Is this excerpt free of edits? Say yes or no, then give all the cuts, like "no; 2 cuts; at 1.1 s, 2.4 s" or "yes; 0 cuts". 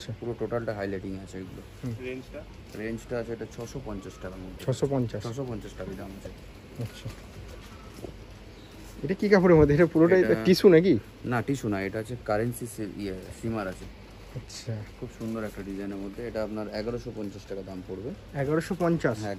yes; 0 cuts